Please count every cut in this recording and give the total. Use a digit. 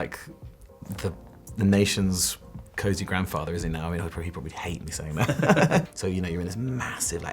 1